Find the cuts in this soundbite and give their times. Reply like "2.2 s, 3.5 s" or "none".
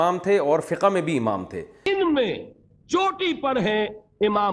1.8 s

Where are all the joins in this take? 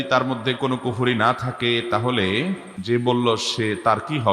2.7 s

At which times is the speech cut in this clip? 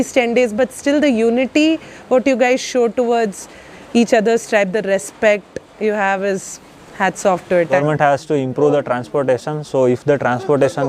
7.8 s

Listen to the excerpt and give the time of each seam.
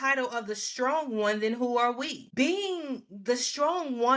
2.2 s

